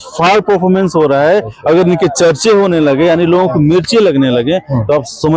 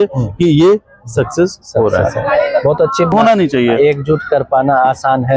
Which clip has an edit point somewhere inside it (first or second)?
second